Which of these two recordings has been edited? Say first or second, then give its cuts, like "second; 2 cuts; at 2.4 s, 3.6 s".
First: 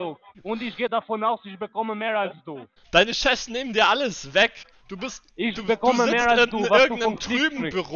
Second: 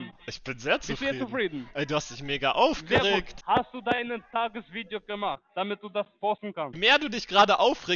second; 2 cuts; at 3.3 s, 6.7 s